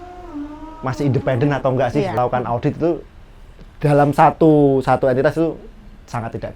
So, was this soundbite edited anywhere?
yes; 1 cut; at 2.2 s

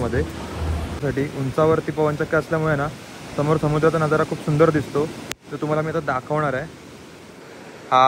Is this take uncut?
no; 1 cut; at 1.0 s

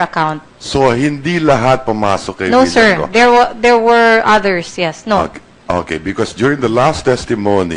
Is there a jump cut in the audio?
no; 0 cuts

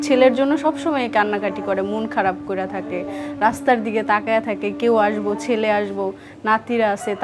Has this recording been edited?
no; 0 cuts

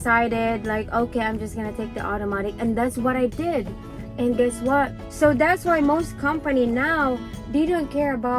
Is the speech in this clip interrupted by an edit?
yes; 1 cut; at 5.0 s

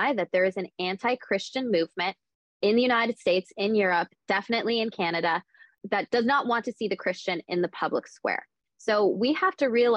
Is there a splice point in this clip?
yes; 1 cut; at 5.7 s

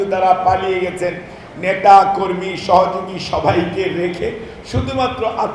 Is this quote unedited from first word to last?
yes; 0 cuts

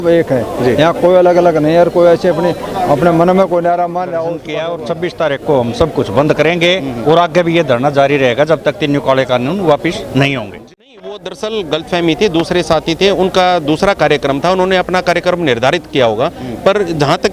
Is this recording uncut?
no; 2 cuts; at 4.5 s, 10.5 s

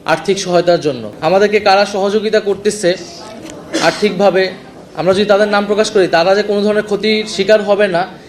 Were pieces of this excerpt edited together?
yes; 1 cut; at 1.1 s

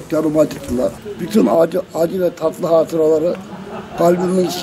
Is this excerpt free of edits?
no; 1 cut; at 1.1 s

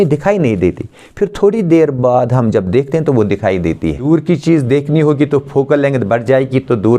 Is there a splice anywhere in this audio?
yes; 1 cut; at 4.0 s

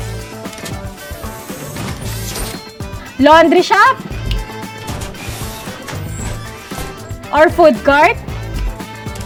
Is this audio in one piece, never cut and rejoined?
yes; 0 cuts

